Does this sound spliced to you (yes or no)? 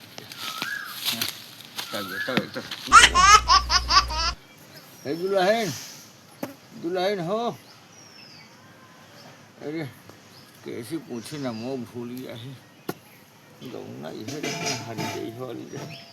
yes